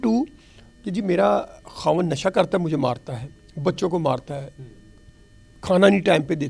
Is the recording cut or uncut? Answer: uncut